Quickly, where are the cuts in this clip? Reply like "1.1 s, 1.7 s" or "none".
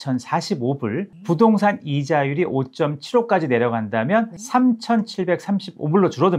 1.1 s, 4.4 s